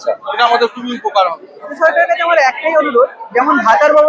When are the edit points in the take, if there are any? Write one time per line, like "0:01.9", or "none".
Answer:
0:01.8